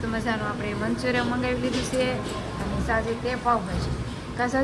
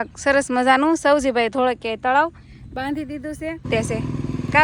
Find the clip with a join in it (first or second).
second